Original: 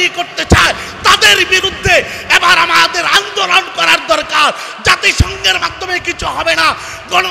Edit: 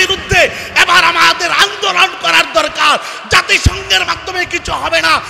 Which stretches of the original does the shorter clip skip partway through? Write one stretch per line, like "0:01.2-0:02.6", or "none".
none